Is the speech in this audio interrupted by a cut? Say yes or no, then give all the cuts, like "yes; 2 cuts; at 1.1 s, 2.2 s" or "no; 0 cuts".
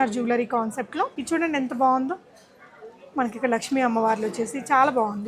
yes; 1 cut; at 1.2 s